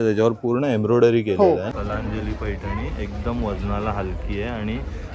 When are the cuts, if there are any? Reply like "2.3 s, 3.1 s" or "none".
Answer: 1.7 s